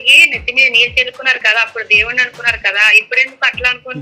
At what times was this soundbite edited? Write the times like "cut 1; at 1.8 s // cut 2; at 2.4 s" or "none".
none